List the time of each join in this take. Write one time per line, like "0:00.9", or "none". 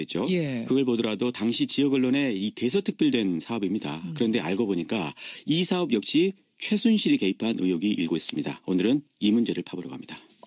0:01.8